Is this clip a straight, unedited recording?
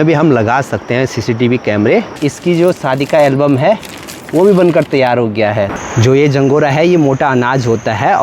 no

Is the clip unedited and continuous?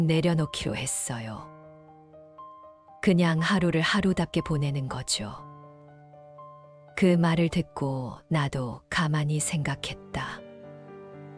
no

